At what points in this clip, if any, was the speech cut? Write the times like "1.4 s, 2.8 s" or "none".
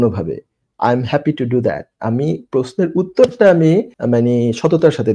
3.9 s